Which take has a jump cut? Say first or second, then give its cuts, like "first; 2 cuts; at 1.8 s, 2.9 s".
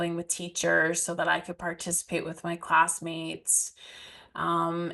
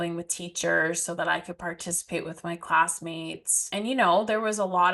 second; 1 cut; at 3.7 s